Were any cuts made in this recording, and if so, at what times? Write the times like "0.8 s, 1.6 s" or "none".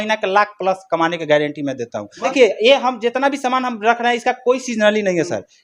2.3 s